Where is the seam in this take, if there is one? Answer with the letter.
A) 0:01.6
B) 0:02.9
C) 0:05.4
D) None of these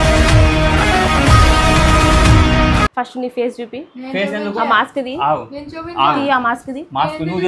B